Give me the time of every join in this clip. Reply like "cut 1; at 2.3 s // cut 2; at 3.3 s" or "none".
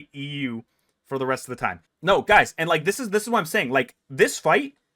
cut 1; at 1.9 s